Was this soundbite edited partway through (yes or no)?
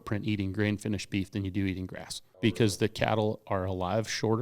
yes